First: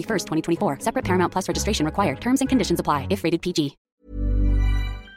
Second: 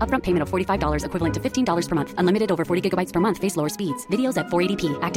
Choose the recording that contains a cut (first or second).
first